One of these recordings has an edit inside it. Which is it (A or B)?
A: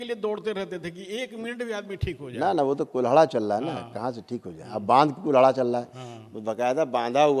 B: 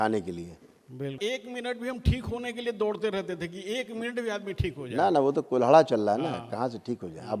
B